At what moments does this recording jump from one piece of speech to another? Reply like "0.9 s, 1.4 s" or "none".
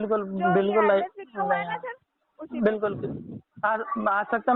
none